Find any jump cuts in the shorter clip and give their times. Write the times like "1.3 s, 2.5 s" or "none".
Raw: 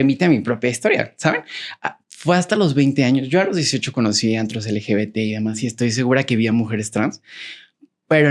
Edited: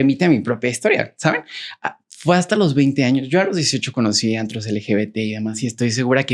none